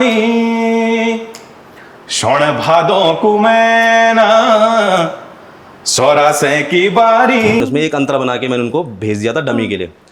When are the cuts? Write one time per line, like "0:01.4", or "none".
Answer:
0:07.6